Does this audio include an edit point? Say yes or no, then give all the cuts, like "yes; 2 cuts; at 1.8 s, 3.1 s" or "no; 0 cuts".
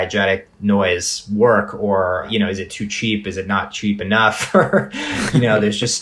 yes; 1 cut; at 2.3 s